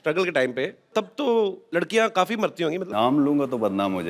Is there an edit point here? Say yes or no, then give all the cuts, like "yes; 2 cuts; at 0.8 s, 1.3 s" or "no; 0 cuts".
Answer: yes; 3 cuts; at 0.9 s, 1.6 s, 2.9 s